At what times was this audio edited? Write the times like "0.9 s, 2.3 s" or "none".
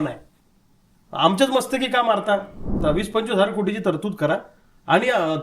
2.8 s